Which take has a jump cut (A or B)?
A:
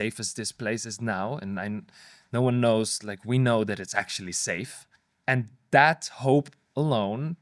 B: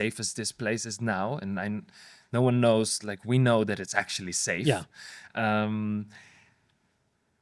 A